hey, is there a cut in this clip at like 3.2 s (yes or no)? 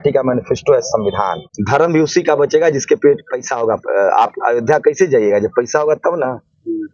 no